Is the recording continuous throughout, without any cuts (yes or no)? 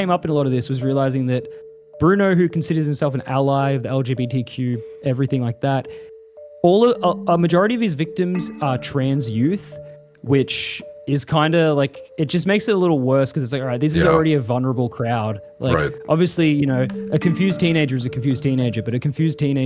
yes